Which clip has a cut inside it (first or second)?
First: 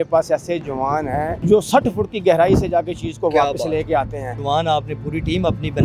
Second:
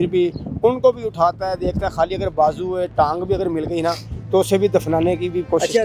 first